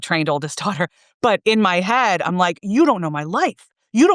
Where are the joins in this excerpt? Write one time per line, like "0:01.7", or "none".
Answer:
none